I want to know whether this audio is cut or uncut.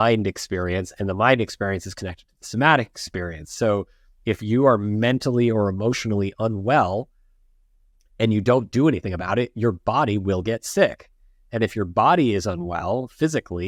uncut